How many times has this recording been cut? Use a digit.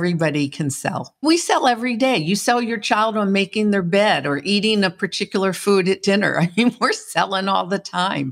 1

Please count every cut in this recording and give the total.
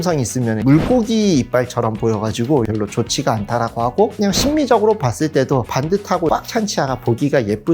0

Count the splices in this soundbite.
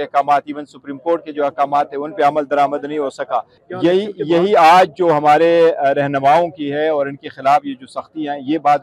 1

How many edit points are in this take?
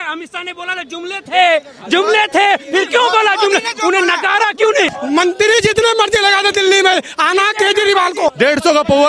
2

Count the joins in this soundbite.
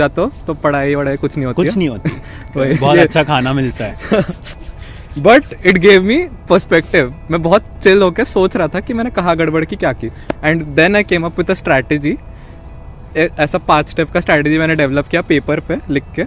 0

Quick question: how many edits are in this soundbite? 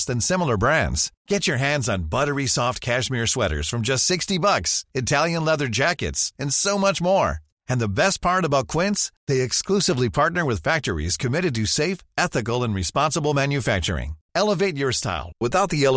0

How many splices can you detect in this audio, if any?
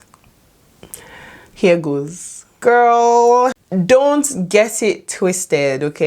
2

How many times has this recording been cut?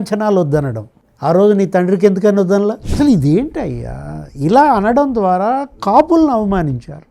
1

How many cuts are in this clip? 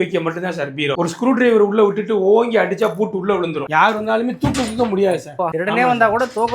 2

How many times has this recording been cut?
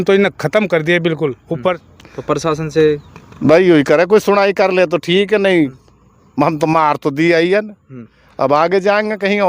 1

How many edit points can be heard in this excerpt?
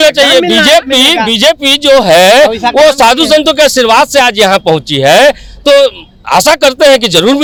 0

